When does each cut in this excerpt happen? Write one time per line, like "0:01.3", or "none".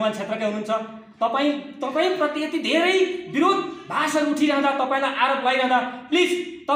none